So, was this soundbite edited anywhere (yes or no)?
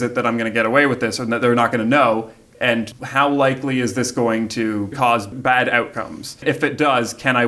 yes